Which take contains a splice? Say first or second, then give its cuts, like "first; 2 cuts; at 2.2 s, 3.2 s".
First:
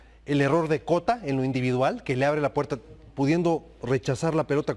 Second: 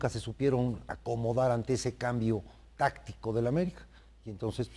second; 1 cut; at 1.4 s